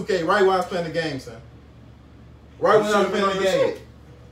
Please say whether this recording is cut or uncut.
uncut